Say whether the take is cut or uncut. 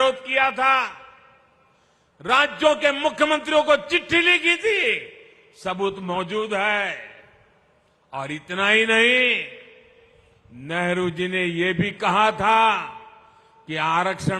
uncut